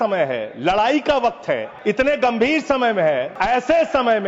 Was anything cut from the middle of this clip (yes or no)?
yes